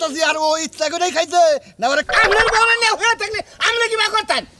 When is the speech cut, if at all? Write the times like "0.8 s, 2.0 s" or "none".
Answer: 2.1 s

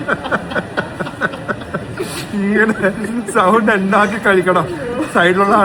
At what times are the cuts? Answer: none

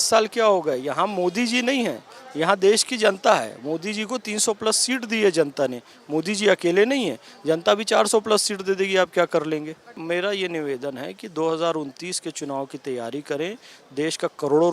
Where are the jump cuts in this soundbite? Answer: 9.9 s

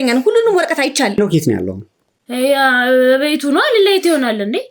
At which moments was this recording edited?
1.1 s

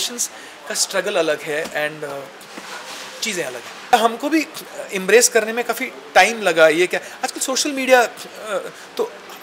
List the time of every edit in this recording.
3.9 s

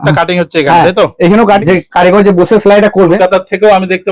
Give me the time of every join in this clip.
1.6 s, 3.2 s

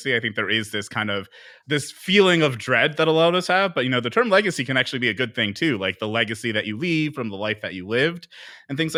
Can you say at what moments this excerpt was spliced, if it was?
none

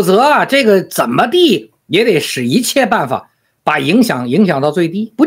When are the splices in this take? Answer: none

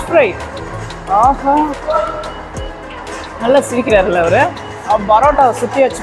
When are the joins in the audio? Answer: none

